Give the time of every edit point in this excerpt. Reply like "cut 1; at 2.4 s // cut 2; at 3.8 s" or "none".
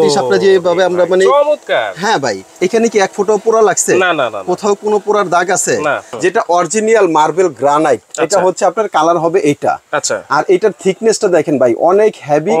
cut 1; at 2.5 s // cut 2; at 6.1 s